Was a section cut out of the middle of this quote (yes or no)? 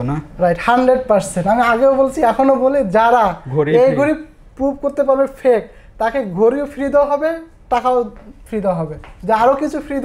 no